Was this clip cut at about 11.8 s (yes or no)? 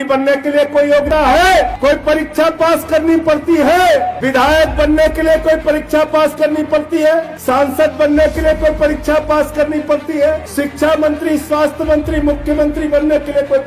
no